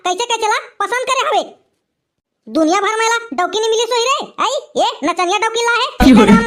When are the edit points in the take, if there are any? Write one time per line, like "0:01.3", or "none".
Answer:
none